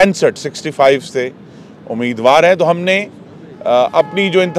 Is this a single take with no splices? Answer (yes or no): yes